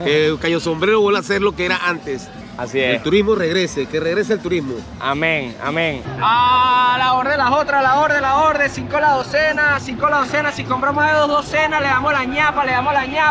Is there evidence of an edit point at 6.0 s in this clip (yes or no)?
yes